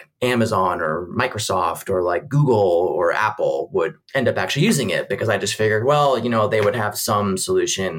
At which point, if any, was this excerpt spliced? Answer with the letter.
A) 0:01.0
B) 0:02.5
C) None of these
C